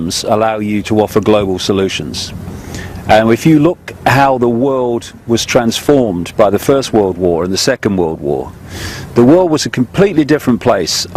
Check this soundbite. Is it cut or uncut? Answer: cut